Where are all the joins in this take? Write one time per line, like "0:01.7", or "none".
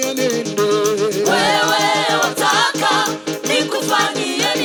none